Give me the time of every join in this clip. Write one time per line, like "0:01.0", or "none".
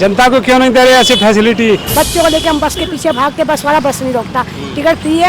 0:01.9